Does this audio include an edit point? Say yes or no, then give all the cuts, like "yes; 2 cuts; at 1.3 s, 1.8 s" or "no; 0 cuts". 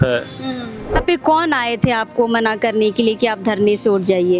yes; 1 cut; at 1.0 s